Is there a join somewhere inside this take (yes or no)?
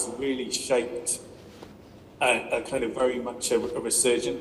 no